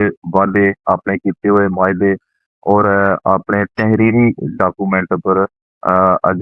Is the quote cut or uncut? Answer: uncut